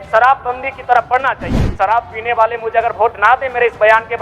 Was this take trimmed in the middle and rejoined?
yes; 1 cut; at 1.5 s

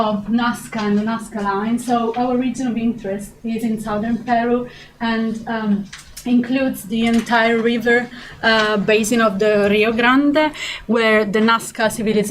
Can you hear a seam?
yes; 1 cut; at 8.9 s

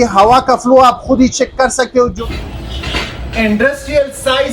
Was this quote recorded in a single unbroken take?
no; 1 cut; at 2.1 s

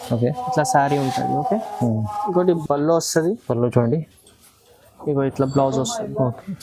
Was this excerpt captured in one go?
no; 1 cut; at 2.6 s

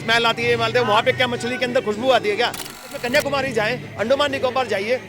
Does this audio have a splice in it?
yes; 1 cut; at 3.0 s

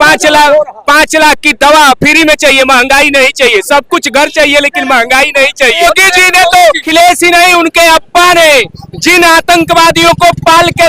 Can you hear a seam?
yes; 2 cuts; at 5.8 s, 6.9 s

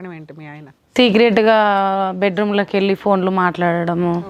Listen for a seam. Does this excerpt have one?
no; 0 cuts

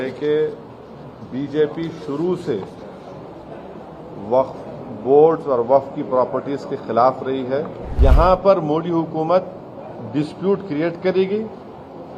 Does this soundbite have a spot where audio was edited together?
yes; 1 cut; at 7.8 s

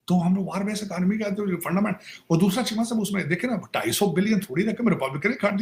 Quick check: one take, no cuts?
yes; 0 cuts

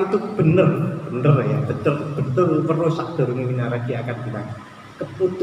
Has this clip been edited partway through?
no; 0 cuts

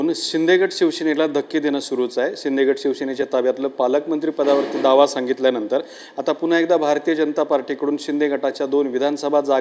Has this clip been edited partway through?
yes; 1 cut; at 3.6 s

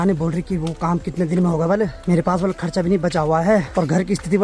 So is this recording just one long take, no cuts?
yes; 0 cuts

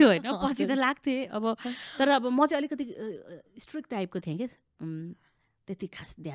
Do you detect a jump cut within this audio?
no; 0 cuts

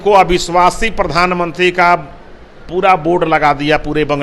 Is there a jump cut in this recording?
no; 0 cuts

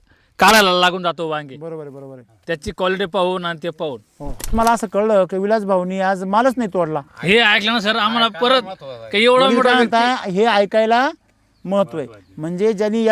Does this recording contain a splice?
yes; 2 cuts; at 4.5 s, 7.1 s

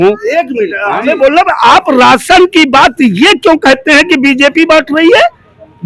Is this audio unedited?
yes; 0 cuts

